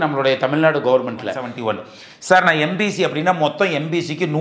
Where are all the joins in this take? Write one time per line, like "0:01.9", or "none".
0:01.5

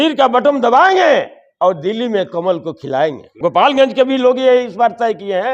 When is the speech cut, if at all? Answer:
0:03.3

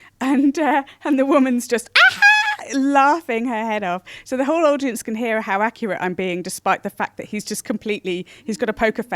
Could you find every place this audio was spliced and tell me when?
0:04.2

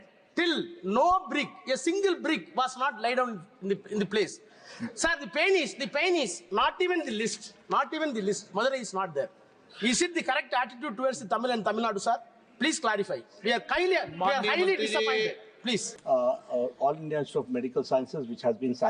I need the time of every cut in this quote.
0:15.9

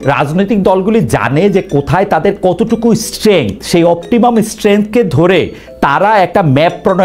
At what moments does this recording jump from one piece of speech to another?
none

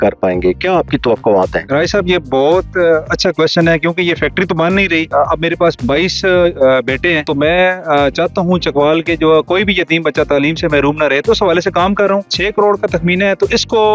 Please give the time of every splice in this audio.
0:01.6
0:05.1
0:07.2
0:12.4

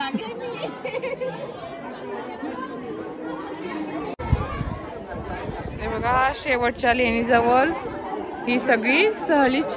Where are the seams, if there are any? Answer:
none

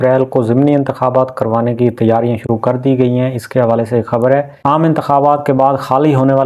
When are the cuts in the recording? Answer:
none

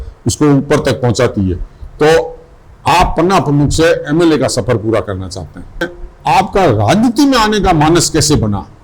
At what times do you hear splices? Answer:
0:05.8

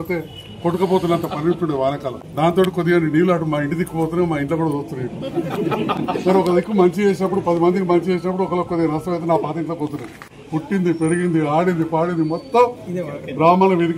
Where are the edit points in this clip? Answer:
0:02.1

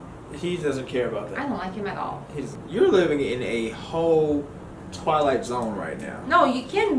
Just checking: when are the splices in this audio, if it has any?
0:02.6

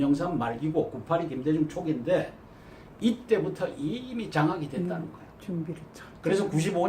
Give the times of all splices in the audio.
0:01.2

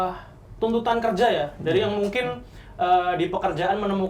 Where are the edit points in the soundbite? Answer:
none

